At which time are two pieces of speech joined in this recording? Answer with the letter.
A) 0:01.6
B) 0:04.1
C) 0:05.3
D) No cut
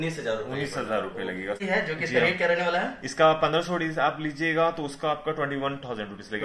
A